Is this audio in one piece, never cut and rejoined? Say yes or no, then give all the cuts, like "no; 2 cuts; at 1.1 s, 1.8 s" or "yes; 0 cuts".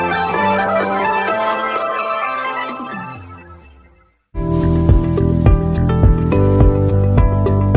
no; 1 cut; at 4.1 s